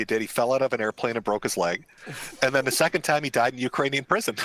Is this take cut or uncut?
uncut